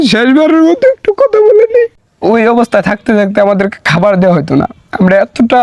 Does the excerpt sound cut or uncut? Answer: cut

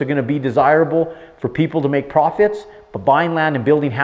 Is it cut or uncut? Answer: uncut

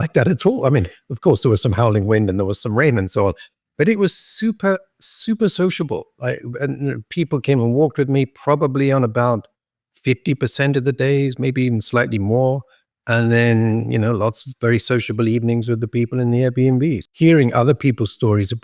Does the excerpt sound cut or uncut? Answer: cut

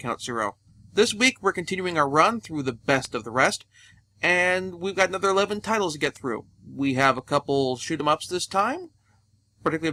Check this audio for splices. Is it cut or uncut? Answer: uncut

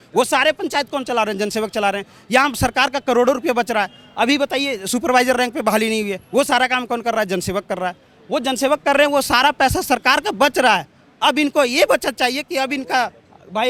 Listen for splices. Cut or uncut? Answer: uncut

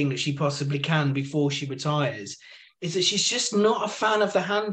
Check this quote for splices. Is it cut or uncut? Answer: uncut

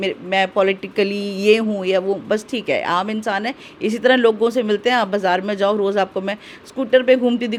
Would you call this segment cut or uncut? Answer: uncut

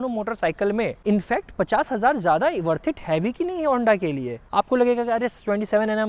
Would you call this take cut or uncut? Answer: cut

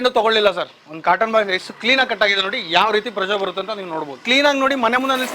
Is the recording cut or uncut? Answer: cut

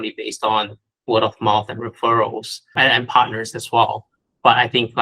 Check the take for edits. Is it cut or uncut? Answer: cut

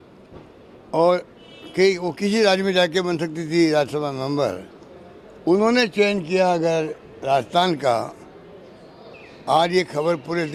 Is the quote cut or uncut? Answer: uncut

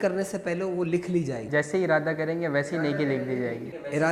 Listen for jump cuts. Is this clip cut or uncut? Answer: uncut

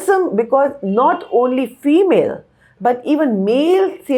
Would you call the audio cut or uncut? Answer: uncut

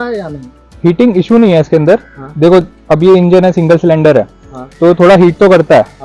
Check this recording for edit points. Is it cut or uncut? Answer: uncut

